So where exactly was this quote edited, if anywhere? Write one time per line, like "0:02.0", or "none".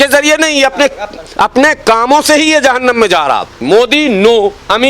0:03.6